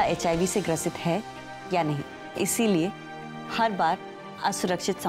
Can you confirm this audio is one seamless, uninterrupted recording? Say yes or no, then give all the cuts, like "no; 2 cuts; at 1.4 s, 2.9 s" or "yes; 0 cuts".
no; 1 cut; at 2.2 s